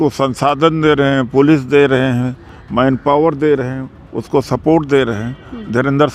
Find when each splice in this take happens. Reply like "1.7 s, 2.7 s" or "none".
none

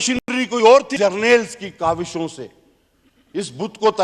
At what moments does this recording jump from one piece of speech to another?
0.9 s

